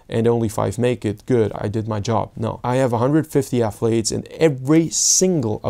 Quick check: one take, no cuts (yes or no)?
no